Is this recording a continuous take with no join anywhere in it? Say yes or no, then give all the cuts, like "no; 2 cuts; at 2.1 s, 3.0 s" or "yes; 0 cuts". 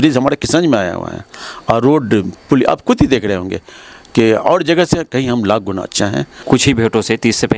no; 1 cut; at 6.3 s